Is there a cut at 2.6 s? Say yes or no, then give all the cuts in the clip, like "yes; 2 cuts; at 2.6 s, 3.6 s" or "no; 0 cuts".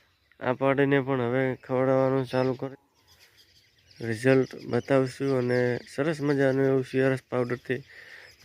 yes; 1 cut; at 2.6 s